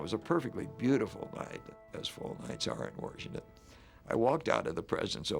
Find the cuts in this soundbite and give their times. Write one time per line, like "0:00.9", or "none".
0:01.8